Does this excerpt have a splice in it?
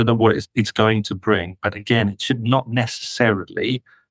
no; 0 cuts

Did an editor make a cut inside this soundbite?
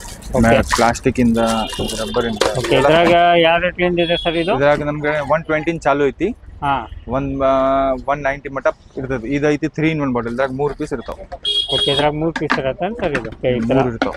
no; 0 cuts

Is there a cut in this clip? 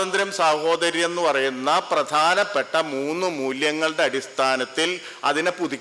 no; 0 cuts

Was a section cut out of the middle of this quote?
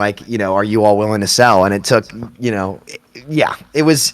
no; 0 cuts

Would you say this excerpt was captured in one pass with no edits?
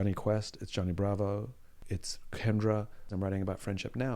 no; 1 cut; at 3.1 s

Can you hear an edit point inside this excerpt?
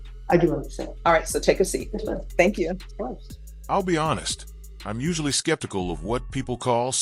no; 0 cuts

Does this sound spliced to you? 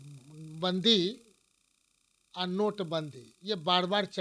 no; 0 cuts

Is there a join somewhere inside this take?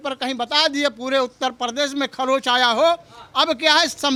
no; 0 cuts

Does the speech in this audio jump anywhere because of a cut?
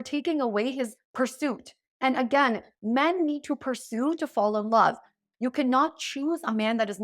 yes; 1 cut; at 5.2 s

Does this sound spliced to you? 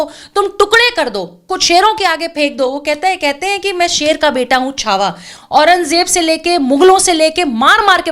yes; 1 cut; at 5.3 s

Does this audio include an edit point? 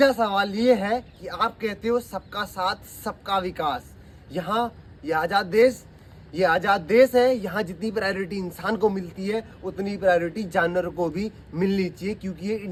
no; 0 cuts

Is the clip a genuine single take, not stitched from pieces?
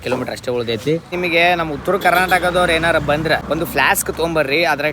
no; 2 cuts; at 1.1 s, 3.4 s

